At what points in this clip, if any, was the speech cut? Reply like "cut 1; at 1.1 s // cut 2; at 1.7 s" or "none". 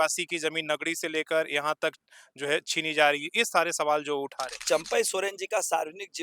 cut 1; at 4.6 s